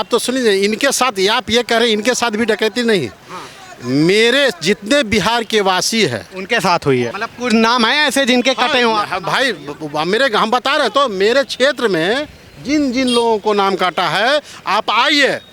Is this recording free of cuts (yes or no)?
no